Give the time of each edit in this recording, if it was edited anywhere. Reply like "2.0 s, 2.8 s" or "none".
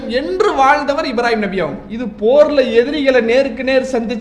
1.9 s